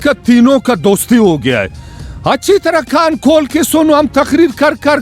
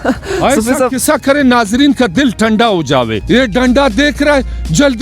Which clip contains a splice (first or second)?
second